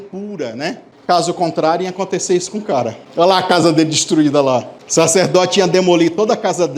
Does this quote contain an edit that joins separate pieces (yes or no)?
yes